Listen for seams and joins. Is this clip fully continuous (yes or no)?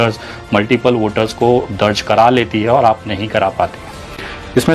yes